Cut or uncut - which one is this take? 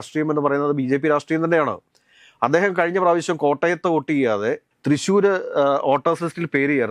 uncut